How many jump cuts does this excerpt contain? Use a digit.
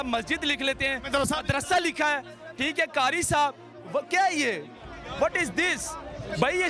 0